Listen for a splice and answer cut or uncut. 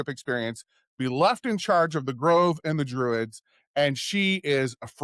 uncut